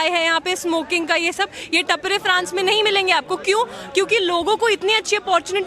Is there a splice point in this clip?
no; 0 cuts

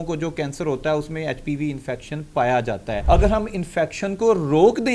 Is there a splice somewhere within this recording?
yes; 1 cut; at 3.0 s

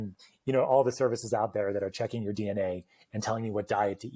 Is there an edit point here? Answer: no; 0 cuts

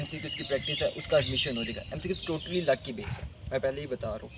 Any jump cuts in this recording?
no; 0 cuts

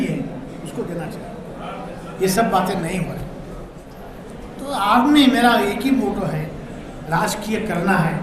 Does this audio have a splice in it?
yes; 1 cut; at 3.8 s

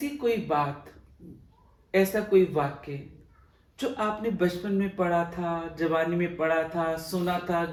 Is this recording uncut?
yes; 0 cuts

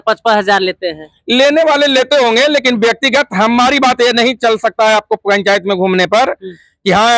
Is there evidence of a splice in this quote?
no; 0 cuts

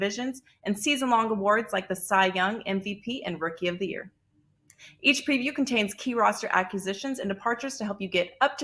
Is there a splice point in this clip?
no; 0 cuts

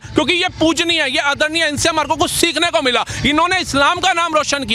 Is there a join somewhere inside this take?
no; 0 cuts

